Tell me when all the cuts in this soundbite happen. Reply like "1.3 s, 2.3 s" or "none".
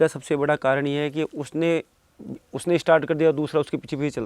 none